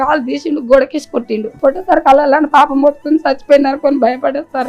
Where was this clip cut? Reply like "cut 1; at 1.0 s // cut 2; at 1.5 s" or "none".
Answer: cut 1; at 1.4 s